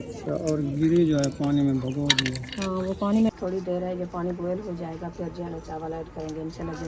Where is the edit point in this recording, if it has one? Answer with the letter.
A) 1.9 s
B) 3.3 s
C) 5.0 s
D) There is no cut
B